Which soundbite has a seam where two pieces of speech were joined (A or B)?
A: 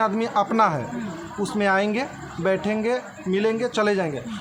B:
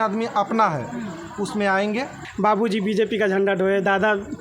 B